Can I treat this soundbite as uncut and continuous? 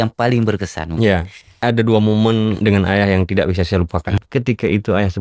no; 3 cuts; at 1.6 s, 2.6 s, 4.2 s

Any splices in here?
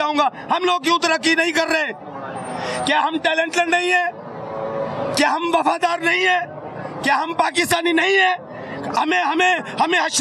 no; 0 cuts

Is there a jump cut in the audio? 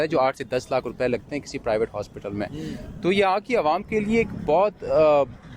no; 0 cuts

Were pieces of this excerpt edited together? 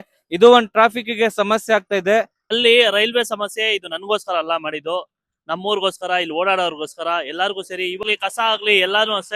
yes; 2 cuts; at 2.5 s, 8.0 s

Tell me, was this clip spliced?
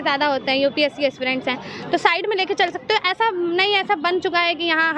no; 0 cuts

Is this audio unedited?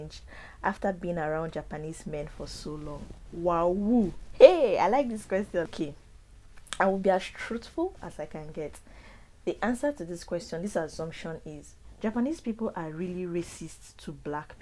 no; 2 cuts; at 5.7 s, 11.8 s

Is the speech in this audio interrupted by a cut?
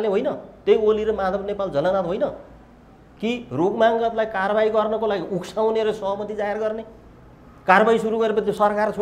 no; 0 cuts

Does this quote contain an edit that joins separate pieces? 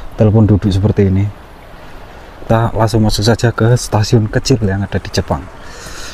yes; 1 cut; at 2.5 s

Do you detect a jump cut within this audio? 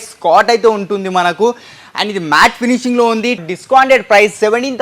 yes; 1 cut; at 3.5 s

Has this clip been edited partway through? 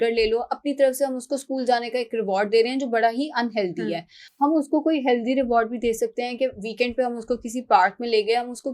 no; 0 cuts

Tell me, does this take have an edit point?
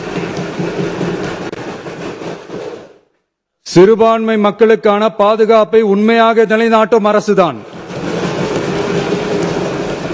no; 0 cuts

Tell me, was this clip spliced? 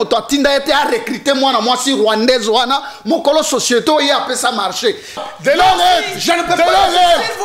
yes; 1 cut; at 5.2 s

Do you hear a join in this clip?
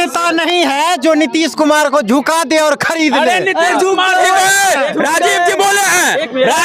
no; 0 cuts

